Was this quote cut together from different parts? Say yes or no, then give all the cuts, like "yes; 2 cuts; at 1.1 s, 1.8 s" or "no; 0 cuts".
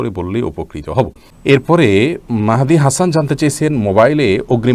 yes; 1 cut; at 1.2 s